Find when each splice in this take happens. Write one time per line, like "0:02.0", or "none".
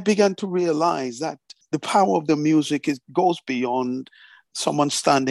0:01.6